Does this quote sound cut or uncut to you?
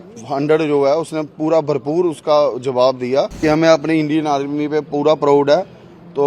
cut